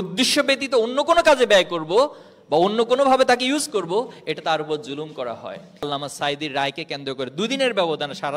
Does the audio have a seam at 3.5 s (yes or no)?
no